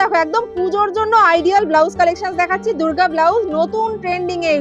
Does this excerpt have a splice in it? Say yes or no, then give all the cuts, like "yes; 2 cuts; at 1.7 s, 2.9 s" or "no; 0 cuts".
no; 0 cuts